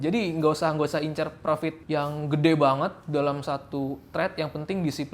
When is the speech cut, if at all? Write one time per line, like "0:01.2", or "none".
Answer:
0:01.8

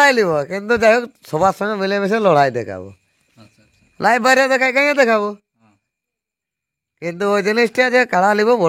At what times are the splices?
none

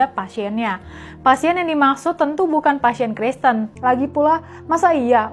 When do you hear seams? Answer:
0:03.7

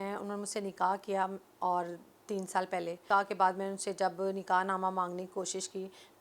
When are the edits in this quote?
0:03.0

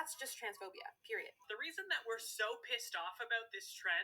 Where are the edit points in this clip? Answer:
0:01.8

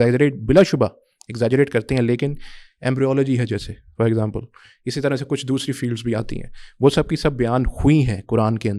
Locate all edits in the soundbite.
none

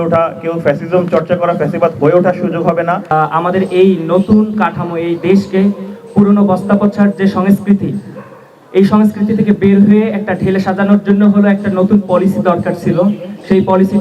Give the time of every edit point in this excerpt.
0:03.1

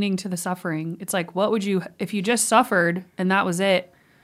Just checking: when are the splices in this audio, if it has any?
none

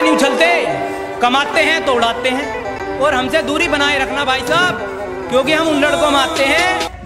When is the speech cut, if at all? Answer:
none

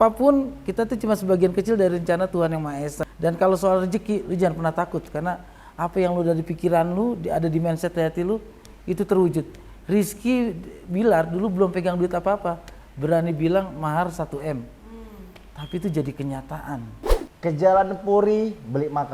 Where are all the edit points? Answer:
0:03.0
0:17.2

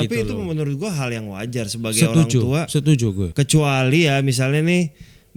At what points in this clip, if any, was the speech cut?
0:03.3

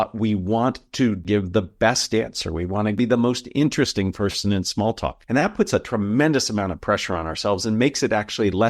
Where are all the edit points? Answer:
0:01.2
0:03.0
0:05.2

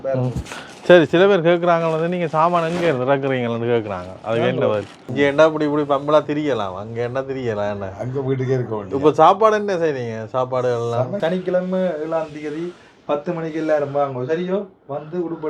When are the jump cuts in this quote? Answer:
0:05.0
0:11.2

